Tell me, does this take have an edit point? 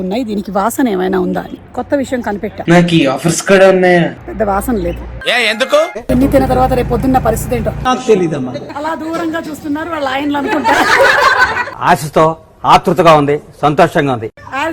yes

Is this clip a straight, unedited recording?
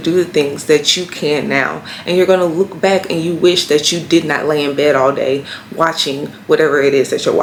yes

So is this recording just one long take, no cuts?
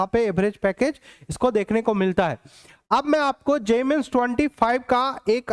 yes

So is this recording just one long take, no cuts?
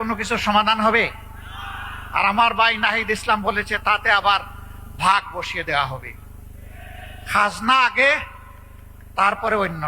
yes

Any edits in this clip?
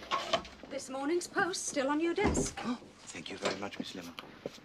no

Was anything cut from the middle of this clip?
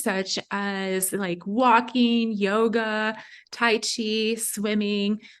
no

